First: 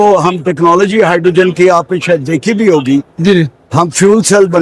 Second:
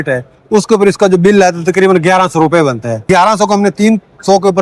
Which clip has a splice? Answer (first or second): second